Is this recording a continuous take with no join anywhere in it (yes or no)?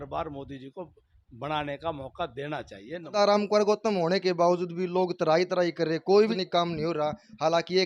no